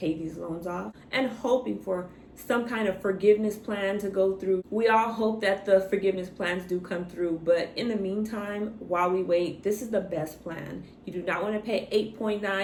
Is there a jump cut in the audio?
no; 0 cuts

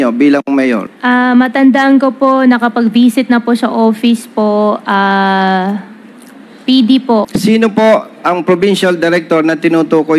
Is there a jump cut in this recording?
yes; 2 cuts; at 0.9 s, 7.3 s

